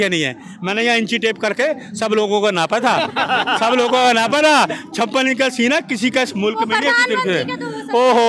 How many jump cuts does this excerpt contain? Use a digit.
0